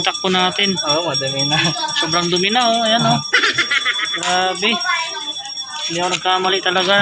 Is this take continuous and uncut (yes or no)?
yes